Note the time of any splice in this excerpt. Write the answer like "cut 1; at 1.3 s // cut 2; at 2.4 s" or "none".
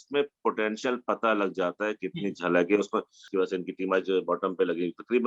cut 1; at 3.3 s